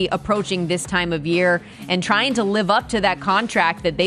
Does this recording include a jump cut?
no; 0 cuts

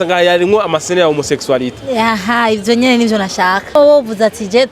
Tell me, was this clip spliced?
yes; 1 cut; at 3.8 s

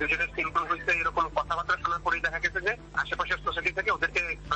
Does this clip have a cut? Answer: no; 0 cuts

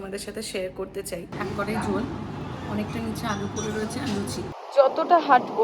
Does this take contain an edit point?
yes; 2 cuts; at 1.3 s, 4.6 s

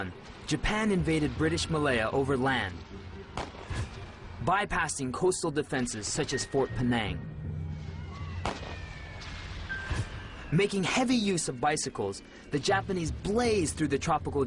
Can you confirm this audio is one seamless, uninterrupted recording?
yes; 0 cuts

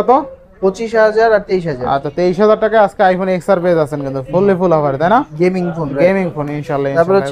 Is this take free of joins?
yes; 0 cuts

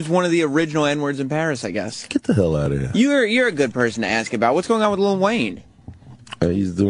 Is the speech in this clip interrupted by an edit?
yes; 1 cut; at 1.4 s

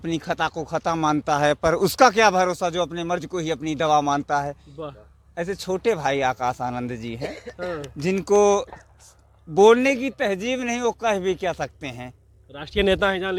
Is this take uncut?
yes; 0 cuts

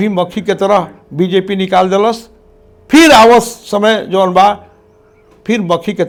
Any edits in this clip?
no; 0 cuts

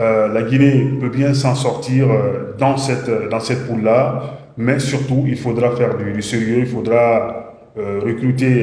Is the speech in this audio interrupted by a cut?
no; 0 cuts

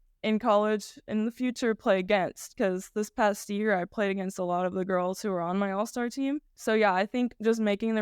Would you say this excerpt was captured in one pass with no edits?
no; 2 cuts; at 1.0 s, 6.5 s

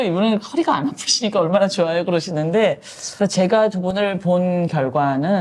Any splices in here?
no; 0 cuts

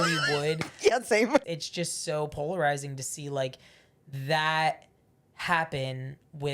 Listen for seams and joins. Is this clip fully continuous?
no; 1 cut; at 1.4 s

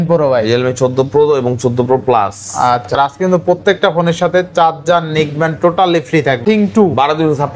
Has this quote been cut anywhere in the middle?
yes; 2 cuts; at 2.9 s, 6.4 s

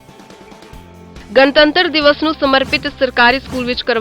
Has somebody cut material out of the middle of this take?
yes; 1 cut; at 1.0 s

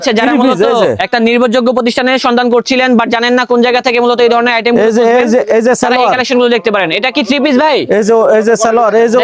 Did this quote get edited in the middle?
no; 0 cuts

